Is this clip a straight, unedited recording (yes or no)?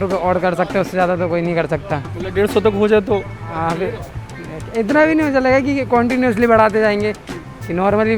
yes